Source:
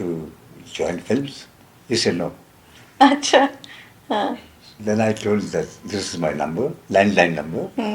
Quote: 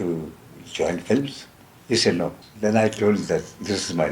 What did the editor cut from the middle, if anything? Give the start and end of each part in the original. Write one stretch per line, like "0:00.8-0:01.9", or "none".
0:02.4-0:04.7